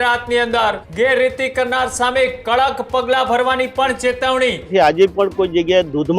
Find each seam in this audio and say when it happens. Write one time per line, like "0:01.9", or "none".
0:00.9
0:04.7